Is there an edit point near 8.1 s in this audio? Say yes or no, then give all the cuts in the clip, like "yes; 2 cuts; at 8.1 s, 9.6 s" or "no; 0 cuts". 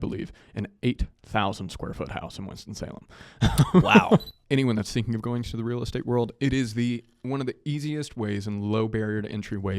no; 1 cut; at 4.3 s